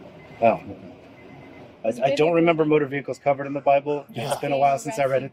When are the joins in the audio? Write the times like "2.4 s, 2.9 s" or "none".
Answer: none

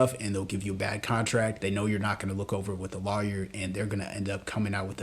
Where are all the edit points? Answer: 1.6 s

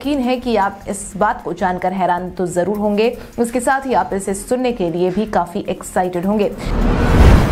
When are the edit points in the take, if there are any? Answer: 6.6 s

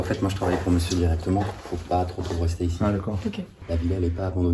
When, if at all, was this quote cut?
3.6 s

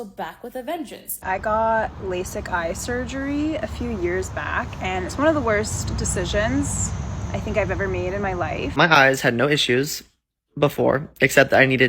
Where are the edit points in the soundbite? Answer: 1.2 s, 8.8 s

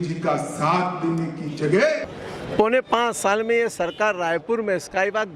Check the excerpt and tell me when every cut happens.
2.2 s

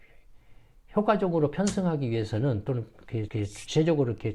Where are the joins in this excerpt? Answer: none

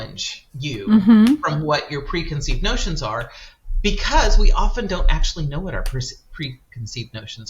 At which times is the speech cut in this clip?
none

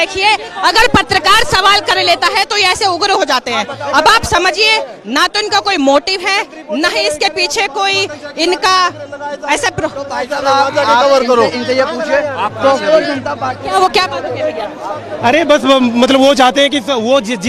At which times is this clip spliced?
none

